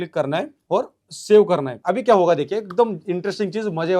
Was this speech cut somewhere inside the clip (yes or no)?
no